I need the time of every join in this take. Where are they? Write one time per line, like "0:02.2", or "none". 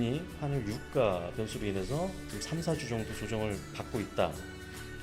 0:02.3